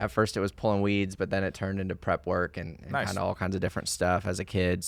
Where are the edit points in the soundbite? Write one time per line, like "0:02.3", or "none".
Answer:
none